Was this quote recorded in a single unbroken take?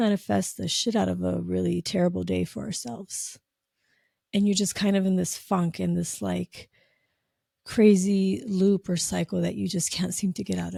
yes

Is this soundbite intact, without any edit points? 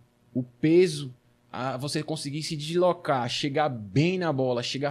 yes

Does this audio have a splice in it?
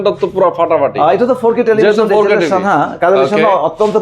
no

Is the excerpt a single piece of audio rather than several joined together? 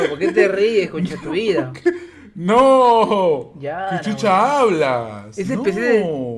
yes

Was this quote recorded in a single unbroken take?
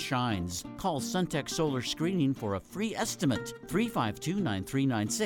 yes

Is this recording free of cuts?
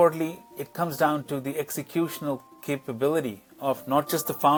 yes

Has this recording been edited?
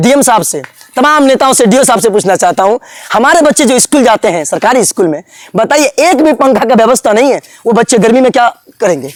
no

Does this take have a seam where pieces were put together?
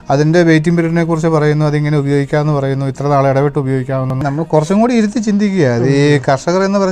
yes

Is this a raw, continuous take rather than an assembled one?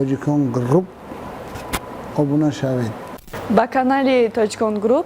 no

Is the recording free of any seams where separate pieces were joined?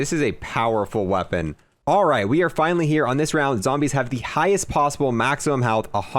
no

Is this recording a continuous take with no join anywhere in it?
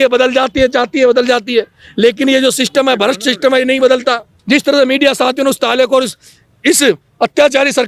no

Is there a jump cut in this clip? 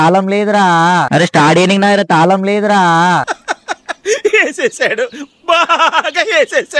yes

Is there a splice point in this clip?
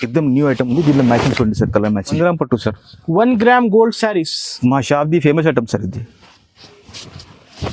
yes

